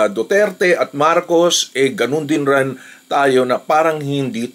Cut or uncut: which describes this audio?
uncut